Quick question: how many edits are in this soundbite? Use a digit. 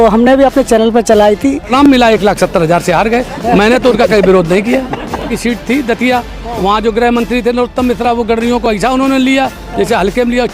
2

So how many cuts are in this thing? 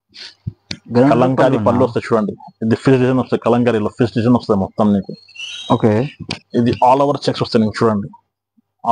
0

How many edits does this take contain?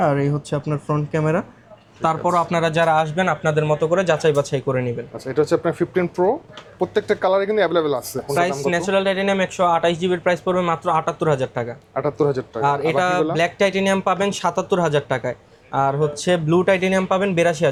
0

